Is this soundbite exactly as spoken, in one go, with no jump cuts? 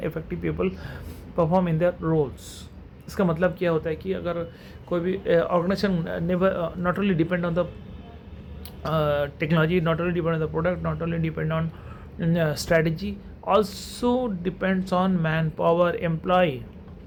yes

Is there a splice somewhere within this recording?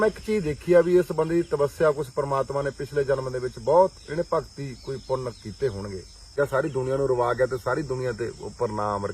yes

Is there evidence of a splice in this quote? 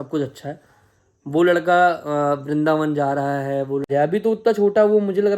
yes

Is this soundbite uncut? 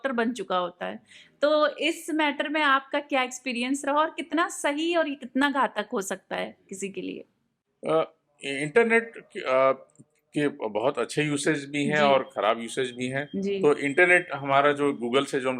yes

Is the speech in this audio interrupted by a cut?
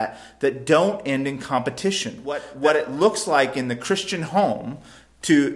yes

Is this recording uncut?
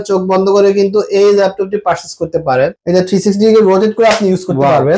no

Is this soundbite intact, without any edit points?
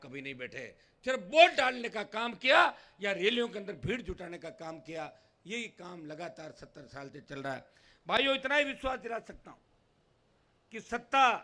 yes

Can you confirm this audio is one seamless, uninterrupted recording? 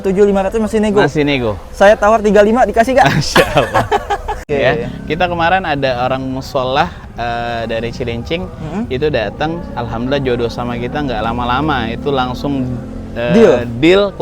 no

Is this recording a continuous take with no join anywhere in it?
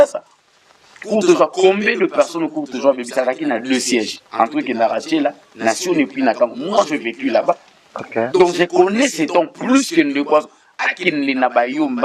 yes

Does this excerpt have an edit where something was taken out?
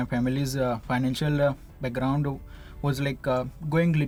no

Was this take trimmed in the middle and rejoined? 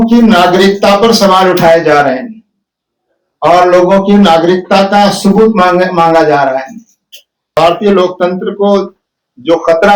yes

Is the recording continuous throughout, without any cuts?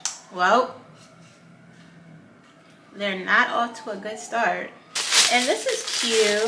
no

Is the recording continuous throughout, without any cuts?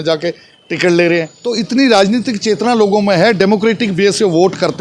no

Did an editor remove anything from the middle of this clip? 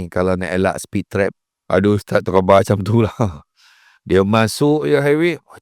yes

